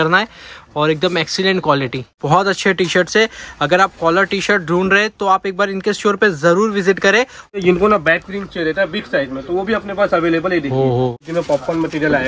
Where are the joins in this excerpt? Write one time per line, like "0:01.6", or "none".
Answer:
0:02.2
0:07.6
0:11.1